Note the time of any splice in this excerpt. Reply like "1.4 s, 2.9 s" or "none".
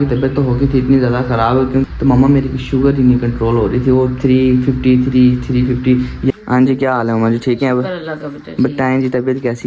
1.8 s, 6.3 s

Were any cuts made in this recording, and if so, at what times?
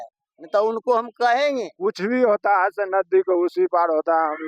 1.7 s

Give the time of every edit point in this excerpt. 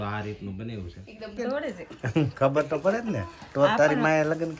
1.4 s

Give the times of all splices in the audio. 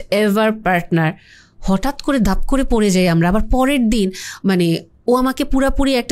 none

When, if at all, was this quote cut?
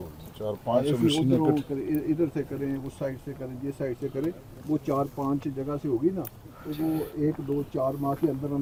none

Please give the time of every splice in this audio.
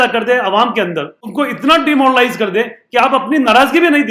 1.2 s

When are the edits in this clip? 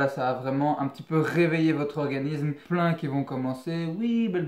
2.6 s

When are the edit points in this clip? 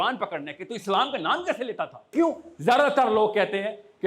2.1 s

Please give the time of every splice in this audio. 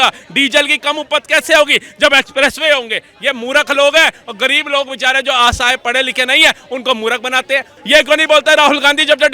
7.7 s

